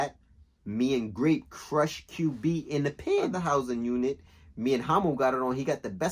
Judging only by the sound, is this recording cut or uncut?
cut